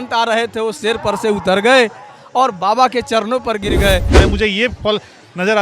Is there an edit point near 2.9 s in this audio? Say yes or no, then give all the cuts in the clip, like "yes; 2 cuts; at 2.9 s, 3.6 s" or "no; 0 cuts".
no; 1 cut; at 4.1 s